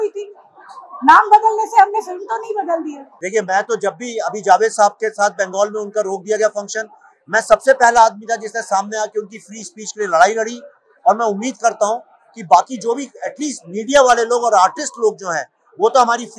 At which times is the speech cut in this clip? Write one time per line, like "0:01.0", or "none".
0:03.0